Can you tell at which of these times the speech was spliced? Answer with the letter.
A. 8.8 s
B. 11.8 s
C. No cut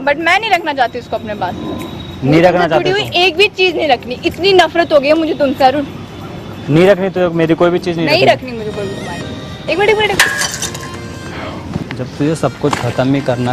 B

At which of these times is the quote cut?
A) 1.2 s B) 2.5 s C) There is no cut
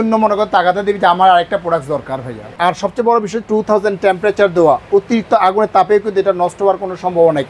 B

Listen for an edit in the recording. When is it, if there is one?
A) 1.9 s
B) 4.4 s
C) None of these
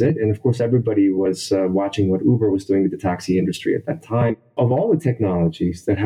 B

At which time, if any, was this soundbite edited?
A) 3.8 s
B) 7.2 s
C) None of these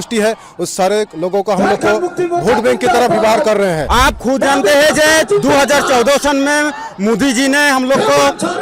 A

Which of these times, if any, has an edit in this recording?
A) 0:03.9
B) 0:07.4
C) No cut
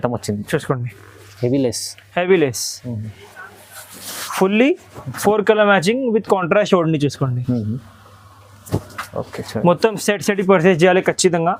C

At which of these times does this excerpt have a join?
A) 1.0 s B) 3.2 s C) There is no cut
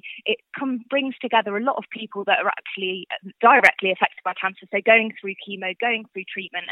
B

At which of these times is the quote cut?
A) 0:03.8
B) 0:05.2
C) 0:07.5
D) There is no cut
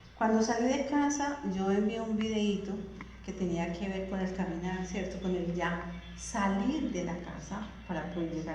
B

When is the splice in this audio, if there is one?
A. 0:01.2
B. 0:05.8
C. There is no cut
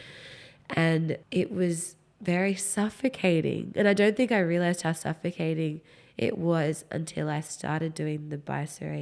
A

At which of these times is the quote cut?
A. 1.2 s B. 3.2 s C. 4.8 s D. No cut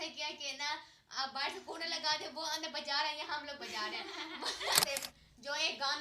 C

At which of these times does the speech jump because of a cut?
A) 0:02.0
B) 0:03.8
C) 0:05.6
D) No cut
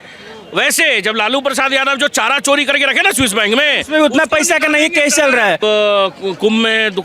C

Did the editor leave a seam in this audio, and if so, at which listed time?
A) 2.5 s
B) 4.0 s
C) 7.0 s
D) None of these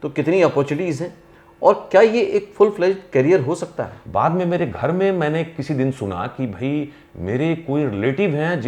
B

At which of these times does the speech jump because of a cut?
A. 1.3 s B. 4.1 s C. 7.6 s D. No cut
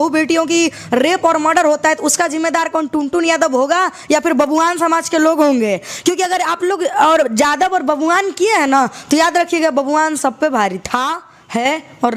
D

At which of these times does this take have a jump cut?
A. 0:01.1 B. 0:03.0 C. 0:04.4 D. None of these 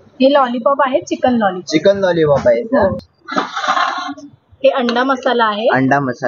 B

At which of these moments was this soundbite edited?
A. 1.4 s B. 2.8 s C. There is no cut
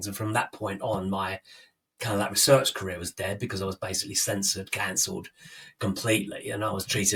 C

